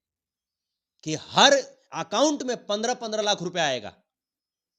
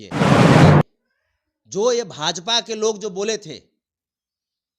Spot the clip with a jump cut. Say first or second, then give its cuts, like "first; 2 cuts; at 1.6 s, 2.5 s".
second; 1 cut; at 1.0 s